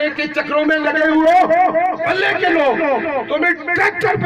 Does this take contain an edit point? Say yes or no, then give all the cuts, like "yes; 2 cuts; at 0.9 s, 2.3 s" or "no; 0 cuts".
yes; 1 cut; at 1.9 s